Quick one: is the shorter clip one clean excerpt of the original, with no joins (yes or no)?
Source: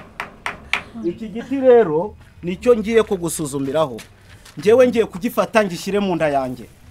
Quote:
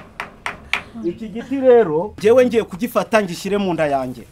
no